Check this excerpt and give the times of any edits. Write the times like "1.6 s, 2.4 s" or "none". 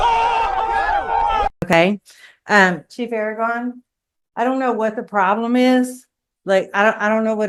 none